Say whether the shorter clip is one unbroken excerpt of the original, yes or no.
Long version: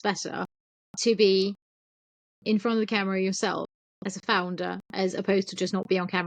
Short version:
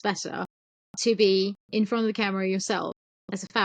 no